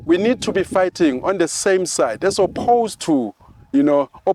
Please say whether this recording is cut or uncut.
uncut